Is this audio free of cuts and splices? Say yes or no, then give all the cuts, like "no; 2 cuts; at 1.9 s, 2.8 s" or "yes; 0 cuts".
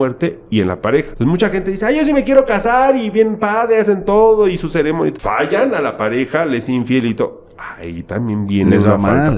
no; 2 cuts; at 1.1 s, 5.2 s